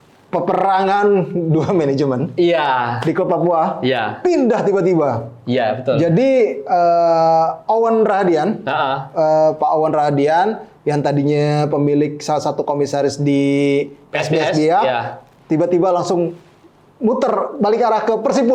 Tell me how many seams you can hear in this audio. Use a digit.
0